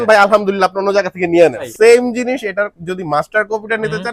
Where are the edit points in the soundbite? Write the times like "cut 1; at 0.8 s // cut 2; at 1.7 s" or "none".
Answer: cut 1; at 1.7 s